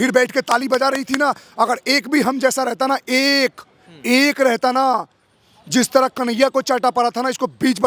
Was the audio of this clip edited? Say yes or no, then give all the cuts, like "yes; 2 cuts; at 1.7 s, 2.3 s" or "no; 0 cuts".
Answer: no; 0 cuts